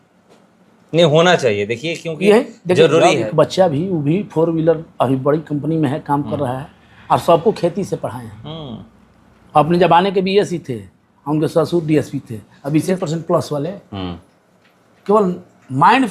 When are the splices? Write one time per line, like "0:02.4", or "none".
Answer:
0:03.3
0:12.9